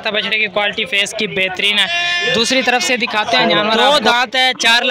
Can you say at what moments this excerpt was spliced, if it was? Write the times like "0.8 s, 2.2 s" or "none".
3.7 s